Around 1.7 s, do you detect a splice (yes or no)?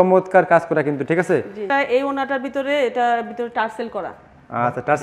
yes